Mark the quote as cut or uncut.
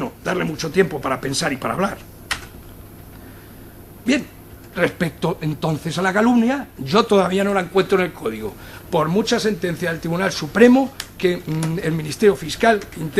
uncut